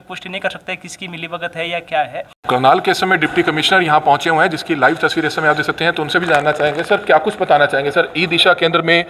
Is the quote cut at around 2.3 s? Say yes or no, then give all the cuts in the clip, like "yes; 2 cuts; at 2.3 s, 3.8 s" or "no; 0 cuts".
yes; 1 cut; at 2.3 s